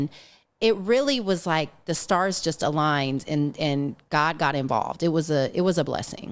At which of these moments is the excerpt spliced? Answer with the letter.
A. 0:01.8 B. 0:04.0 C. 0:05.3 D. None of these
D